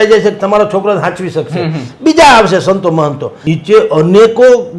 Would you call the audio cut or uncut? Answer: cut